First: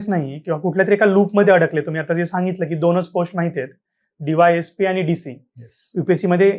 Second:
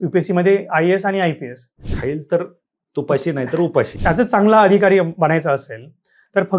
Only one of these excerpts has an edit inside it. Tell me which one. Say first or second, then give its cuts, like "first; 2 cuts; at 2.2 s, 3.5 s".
second; 2 cuts; at 1.8 s, 3.9 s